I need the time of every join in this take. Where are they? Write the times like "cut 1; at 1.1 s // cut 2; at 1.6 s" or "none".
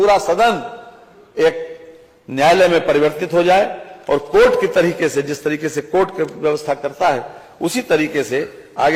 none